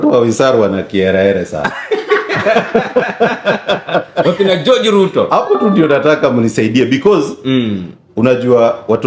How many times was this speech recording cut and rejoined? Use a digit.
0